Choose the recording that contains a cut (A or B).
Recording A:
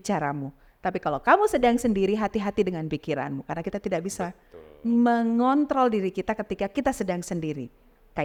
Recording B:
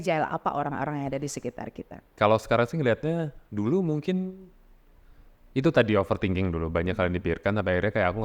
B